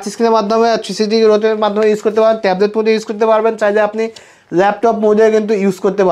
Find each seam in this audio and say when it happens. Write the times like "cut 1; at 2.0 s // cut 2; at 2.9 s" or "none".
none

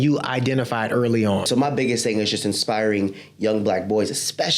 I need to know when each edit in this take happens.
cut 1; at 1.5 s

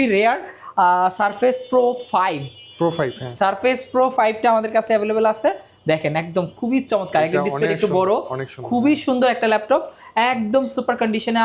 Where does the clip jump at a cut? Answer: none

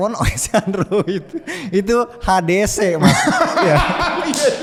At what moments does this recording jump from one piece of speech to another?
none

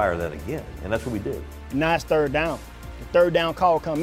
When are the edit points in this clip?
none

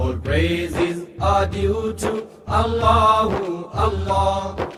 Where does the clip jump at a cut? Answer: none

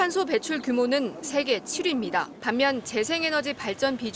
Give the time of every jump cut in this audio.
cut 1; at 2.3 s

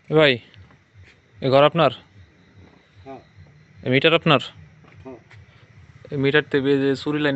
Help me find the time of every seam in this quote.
none

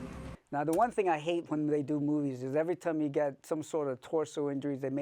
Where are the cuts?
none

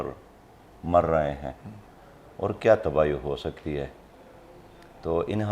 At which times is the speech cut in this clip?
none

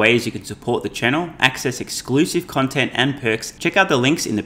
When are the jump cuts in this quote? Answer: cut 1; at 3.5 s

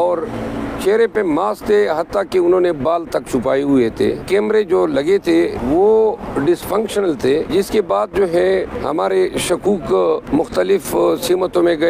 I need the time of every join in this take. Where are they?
cut 1; at 4.2 s // cut 2; at 5.6 s // cut 3; at 7.5 s // cut 4; at 8.8 s // cut 5; at 10.2 s

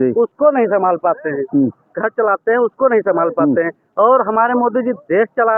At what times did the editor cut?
none

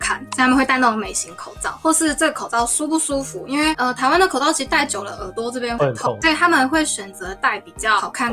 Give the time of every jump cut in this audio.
none

